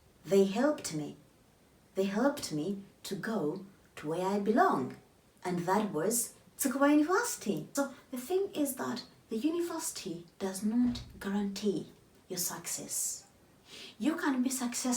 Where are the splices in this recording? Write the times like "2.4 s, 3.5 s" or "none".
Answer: 7.7 s